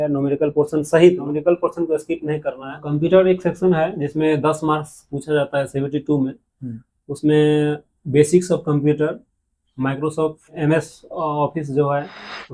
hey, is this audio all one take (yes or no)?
no